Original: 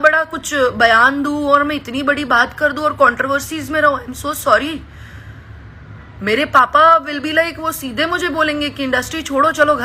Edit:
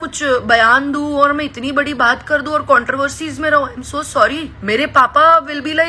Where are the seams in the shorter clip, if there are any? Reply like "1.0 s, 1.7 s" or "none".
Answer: 4.5 s